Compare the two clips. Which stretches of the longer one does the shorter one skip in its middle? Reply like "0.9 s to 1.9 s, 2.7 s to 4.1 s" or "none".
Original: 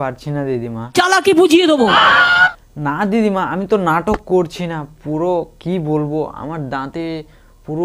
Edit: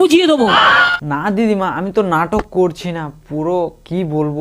2.3 s to 2.7 s